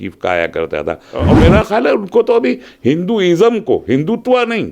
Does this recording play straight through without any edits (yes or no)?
no